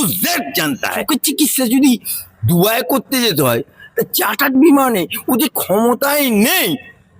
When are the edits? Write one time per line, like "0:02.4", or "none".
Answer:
0:01.0